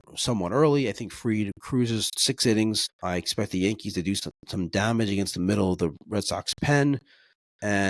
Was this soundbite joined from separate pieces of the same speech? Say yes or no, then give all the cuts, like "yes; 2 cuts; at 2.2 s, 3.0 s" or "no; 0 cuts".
yes; 2 cuts; at 2.8 s, 4.2 s